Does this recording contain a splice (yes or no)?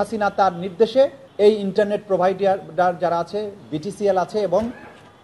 yes